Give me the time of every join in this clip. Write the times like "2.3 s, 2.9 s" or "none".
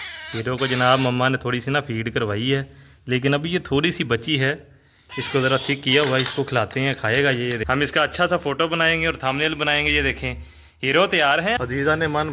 7.6 s, 11.6 s